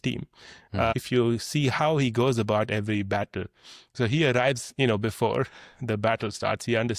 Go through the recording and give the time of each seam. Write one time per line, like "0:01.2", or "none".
0:00.9